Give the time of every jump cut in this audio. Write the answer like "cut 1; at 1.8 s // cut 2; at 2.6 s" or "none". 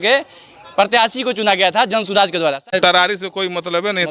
cut 1; at 2.6 s